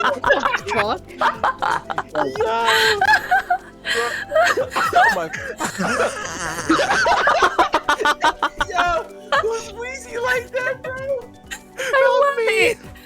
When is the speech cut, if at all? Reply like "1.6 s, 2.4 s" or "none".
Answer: 2.6 s, 5.7 s

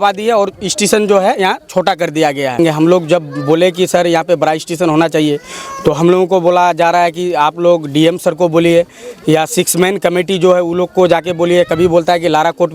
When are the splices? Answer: none

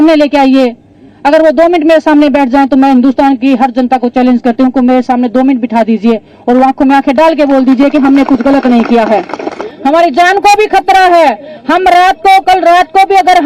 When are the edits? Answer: 9.7 s

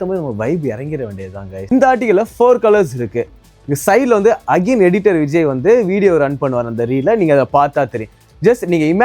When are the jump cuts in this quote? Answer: 1.7 s

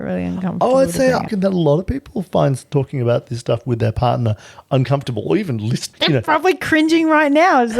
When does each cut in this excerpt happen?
1.3 s

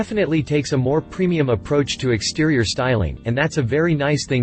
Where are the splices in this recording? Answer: none

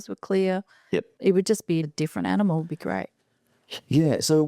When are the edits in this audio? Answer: 1.9 s

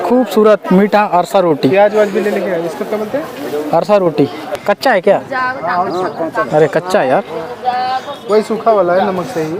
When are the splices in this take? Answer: 4.6 s

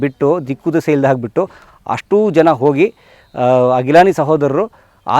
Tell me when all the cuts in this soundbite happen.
none

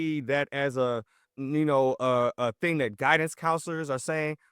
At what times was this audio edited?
1.4 s

